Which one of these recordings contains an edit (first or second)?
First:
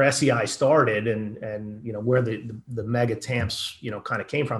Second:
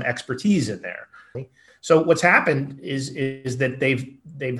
second